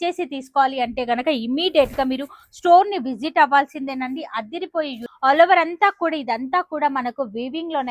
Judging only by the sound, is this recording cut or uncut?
cut